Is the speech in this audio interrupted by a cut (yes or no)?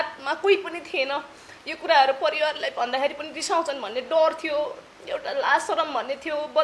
no